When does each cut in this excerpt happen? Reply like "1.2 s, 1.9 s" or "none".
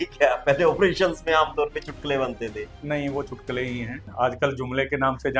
4.0 s